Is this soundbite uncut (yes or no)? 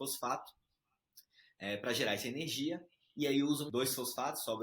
no